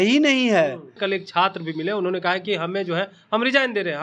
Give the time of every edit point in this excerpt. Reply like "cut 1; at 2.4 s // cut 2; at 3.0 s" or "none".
cut 1; at 1.0 s